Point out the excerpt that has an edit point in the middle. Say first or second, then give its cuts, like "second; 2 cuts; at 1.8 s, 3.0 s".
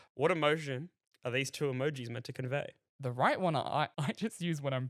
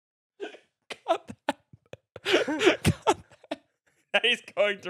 first; 2 cuts; at 2.8 s, 4.0 s